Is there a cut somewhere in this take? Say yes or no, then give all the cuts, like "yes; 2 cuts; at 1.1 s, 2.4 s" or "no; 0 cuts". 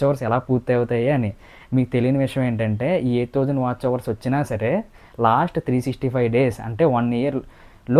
no; 0 cuts